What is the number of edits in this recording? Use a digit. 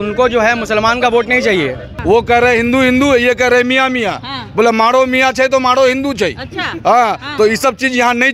1